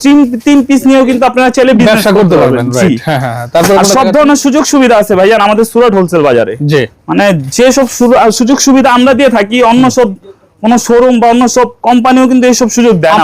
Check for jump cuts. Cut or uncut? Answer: uncut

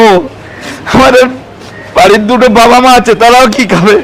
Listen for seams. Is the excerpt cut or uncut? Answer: uncut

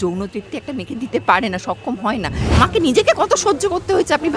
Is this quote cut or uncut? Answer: cut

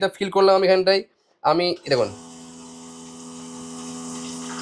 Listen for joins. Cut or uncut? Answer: uncut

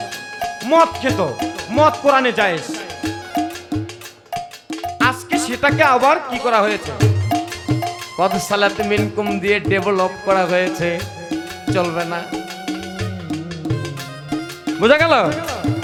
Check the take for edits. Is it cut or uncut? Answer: uncut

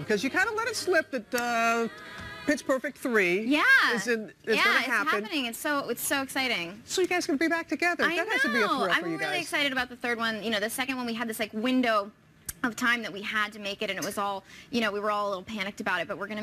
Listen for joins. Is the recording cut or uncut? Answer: cut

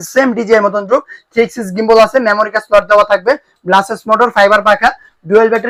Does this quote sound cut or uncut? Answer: uncut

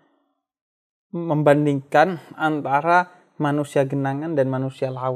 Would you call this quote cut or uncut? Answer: uncut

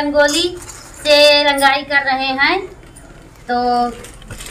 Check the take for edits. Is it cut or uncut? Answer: uncut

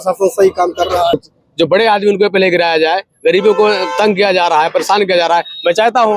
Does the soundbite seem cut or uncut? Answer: cut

